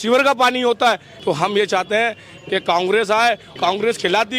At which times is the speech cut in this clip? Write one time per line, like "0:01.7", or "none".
0:01.1
0:03.5